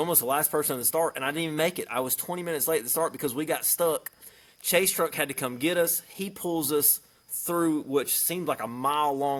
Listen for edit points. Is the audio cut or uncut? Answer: uncut